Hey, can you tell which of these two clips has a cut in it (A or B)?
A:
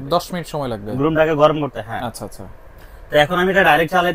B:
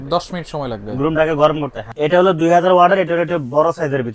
B